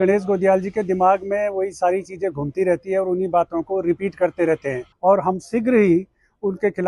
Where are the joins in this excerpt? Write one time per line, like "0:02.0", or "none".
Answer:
0:04.9